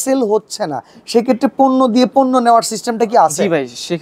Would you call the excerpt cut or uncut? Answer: uncut